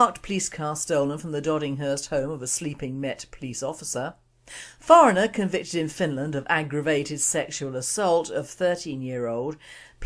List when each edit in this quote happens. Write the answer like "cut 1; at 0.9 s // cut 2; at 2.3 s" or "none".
cut 1; at 3.5 s